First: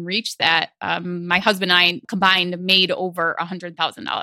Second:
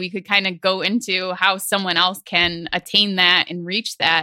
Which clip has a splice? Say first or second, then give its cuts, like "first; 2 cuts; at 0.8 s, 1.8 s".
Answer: first; 1 cut; at 2.0 s